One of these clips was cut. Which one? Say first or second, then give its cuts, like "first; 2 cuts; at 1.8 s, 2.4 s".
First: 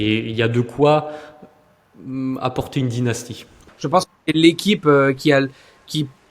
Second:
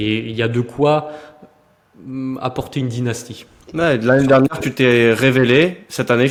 first; 1 cut; at 3.6 s